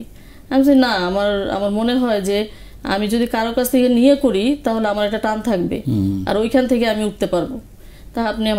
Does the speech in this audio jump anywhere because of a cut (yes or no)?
no